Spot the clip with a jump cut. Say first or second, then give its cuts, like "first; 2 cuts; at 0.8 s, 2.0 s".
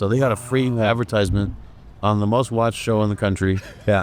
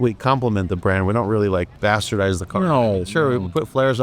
second; 1 cut; at 1.7 s